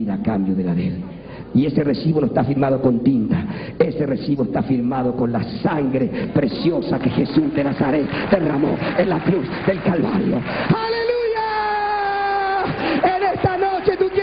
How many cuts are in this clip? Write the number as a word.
one